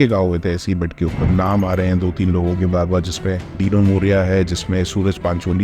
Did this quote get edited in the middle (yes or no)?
yes